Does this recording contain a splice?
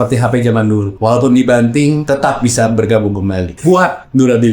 yes; 3 cuts; at 0.9 s, 2.0 s, 3.5 s

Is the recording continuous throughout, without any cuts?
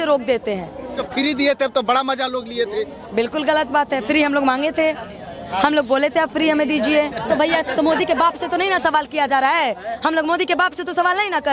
no; 2 cuts; at 1.0 s, 7.2 s

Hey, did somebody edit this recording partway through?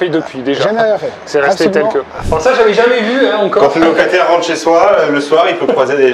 yes; 1 cut; at 2.2 s

